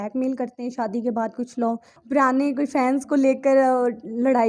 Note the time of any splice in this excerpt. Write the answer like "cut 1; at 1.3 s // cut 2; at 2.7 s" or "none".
cut 1; at 1.9 s